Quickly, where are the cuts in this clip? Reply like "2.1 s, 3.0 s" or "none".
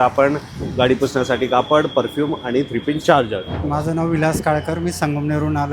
3.6 s